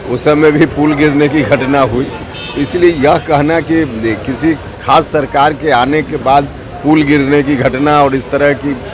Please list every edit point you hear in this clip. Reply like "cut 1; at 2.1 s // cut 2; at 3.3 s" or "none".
none